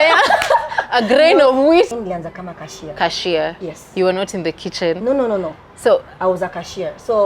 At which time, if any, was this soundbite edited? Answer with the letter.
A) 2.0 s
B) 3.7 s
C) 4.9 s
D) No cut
A